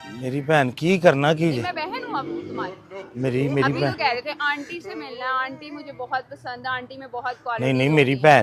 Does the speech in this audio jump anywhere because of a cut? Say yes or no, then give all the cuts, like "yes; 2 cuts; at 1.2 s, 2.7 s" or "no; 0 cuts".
no; 0 cuts